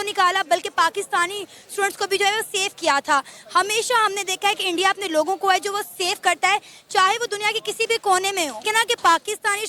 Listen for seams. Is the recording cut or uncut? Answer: cut